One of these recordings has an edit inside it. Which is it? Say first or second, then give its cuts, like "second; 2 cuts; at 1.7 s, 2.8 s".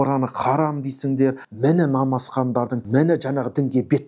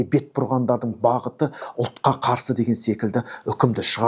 first; 2 cuts; at 1.5 s, 2.8 s